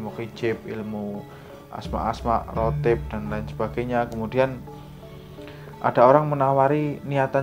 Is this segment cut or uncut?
uncut